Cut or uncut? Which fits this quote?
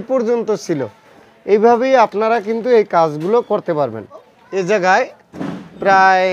cut